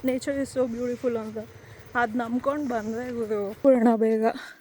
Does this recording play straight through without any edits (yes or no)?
no